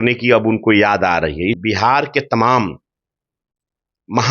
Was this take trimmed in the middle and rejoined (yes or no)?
yes